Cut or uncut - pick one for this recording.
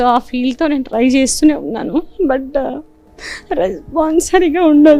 uncut